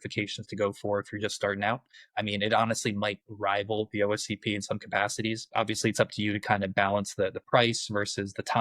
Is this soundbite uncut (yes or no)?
no